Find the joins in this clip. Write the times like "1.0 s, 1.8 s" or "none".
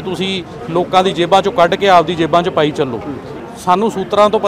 3.3 s